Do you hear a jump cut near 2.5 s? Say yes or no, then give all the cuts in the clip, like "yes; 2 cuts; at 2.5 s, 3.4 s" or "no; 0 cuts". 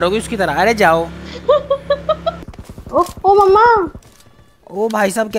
yes; 1 cut; at 2.5 s